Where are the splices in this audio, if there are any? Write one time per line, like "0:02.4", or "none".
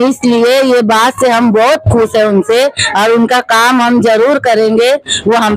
none

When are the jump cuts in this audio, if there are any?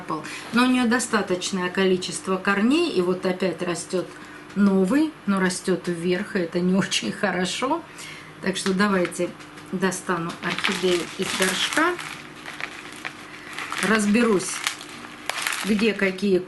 none

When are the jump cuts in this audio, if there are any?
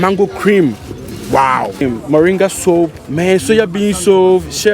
0:01.8
0:03.0

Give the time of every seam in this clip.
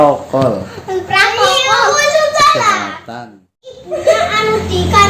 0:03.8

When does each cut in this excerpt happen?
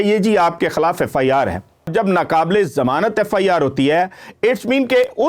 0:01.9

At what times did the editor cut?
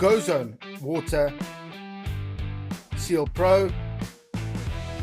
0:03.8

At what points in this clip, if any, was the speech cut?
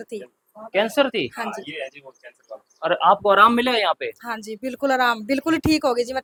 none

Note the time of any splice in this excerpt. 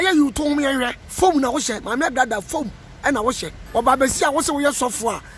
0:01.0
0:03.5

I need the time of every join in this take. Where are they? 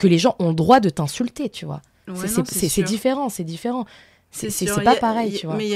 none

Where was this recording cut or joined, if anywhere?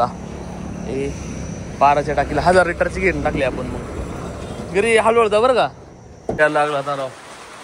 0:06.4

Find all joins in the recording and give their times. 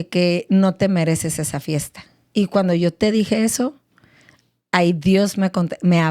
0:02.2

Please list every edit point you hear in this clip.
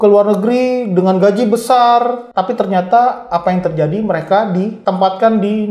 0:02.2
0:04.8

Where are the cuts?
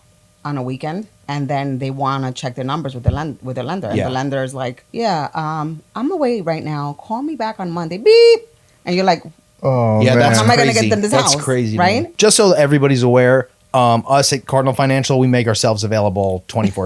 0:01.2
0:04.8
0:12.1

